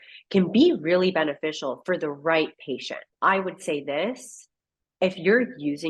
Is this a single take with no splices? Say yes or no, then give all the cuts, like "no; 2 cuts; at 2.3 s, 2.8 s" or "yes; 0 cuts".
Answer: no; 1 cut; at 3.0 s